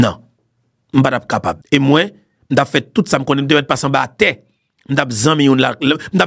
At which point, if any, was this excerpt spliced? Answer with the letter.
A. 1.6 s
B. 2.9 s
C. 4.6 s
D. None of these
A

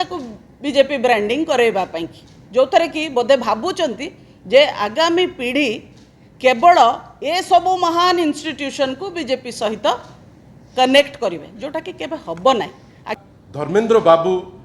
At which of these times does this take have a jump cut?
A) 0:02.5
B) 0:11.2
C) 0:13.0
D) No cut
C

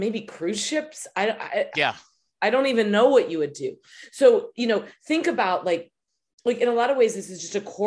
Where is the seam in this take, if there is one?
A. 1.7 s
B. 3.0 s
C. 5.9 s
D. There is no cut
D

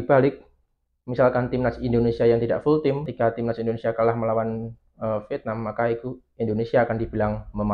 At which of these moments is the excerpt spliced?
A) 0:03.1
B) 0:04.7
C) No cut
A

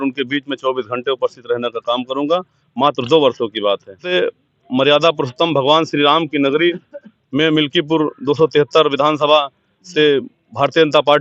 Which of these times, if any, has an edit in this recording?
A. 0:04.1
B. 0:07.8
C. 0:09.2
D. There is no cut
A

